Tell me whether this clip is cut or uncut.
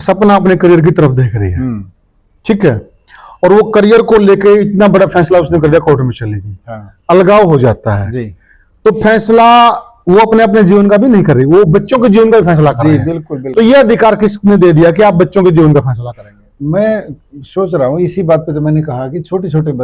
uncut